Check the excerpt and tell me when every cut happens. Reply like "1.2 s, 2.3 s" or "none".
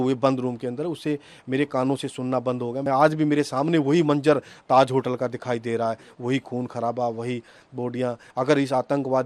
2.8 s, 8.2 s